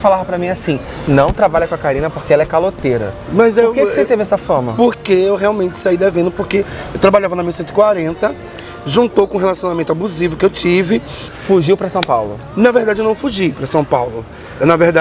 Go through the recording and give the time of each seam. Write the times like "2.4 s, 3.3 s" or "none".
8.4 s, 11.3 s